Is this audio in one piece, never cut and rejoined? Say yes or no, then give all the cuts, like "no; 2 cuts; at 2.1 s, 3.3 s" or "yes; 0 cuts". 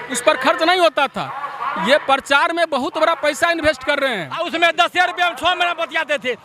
no; 1 cut; at 4.5 s